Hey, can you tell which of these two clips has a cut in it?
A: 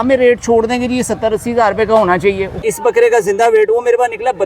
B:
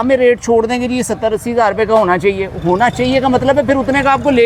A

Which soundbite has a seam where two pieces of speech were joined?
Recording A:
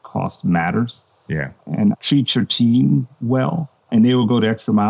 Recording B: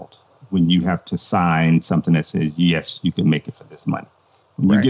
A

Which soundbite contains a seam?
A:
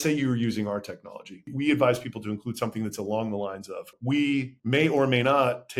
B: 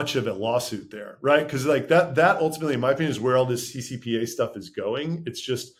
A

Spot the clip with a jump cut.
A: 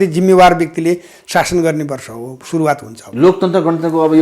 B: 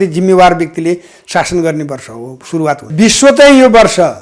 B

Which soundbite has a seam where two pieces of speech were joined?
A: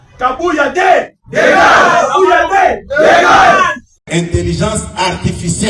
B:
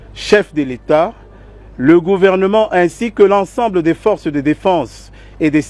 A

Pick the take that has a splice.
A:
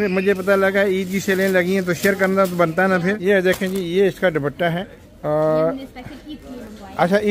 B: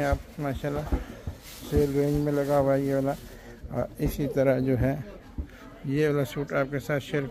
A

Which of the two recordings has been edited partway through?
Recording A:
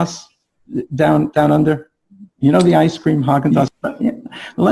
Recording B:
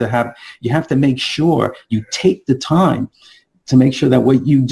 A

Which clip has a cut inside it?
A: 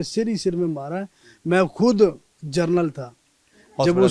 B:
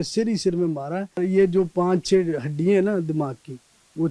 B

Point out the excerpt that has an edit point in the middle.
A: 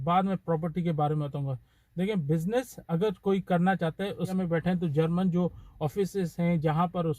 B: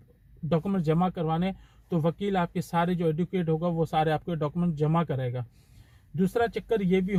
A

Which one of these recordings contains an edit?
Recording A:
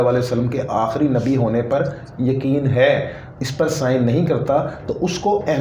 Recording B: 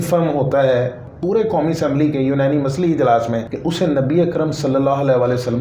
B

